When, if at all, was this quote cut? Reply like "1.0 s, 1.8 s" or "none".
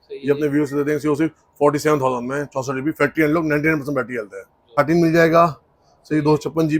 4.7 s